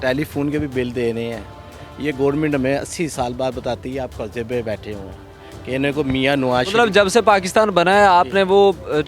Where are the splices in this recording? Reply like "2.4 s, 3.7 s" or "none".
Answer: none

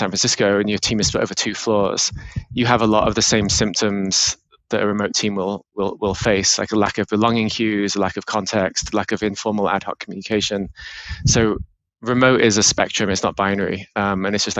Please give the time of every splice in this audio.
none

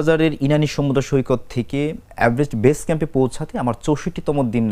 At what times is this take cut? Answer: none

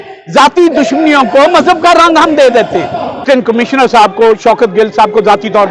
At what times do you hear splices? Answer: 3.2 s

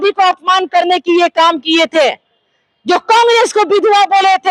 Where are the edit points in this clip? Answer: none

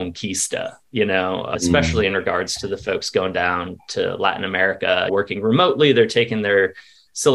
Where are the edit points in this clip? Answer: 1.5 s, 5.1 s

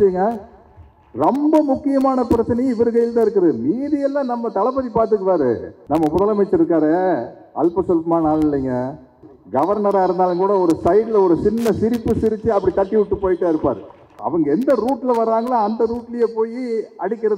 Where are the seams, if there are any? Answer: 5.7 s, 9.2 s, 14.2 s

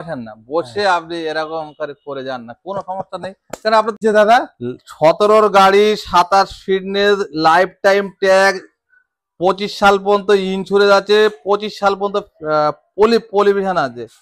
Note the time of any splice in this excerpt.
4.0 s

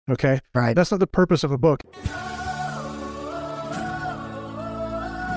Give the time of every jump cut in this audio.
1.8 s

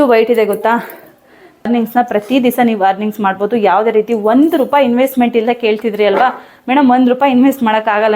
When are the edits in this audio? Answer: 1.7 s

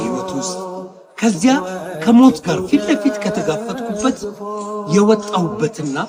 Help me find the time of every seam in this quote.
none

